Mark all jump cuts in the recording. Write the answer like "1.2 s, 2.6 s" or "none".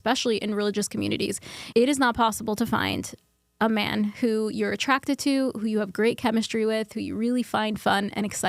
none